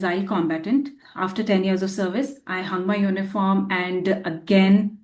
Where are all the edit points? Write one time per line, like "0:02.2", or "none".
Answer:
0:01.1